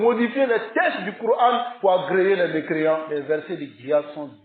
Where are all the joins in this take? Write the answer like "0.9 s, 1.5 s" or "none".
1.7 s, 3.1 s